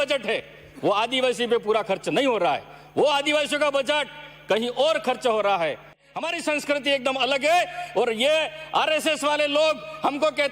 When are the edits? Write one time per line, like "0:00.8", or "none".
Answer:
0:06.0